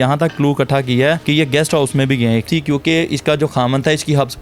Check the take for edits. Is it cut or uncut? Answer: cut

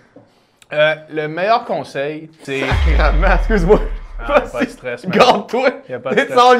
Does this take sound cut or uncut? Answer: cut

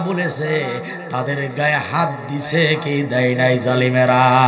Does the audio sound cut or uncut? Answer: uncut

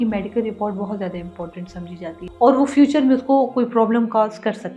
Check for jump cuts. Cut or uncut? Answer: cut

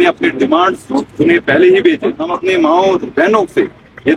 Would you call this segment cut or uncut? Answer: cut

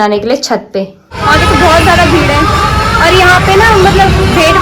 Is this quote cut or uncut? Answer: cut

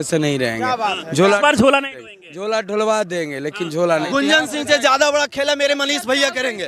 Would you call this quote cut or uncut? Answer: cut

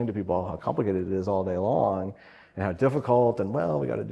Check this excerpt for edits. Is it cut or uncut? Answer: uncut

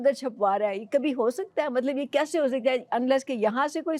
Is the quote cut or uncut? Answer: uncut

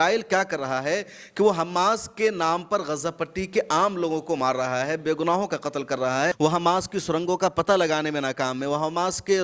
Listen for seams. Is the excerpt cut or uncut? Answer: cut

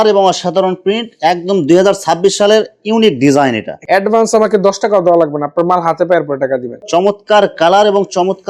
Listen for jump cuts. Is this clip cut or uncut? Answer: cut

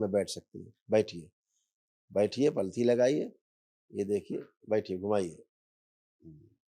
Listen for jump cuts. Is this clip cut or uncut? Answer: uncut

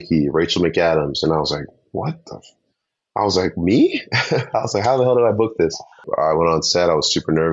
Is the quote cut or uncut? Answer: cut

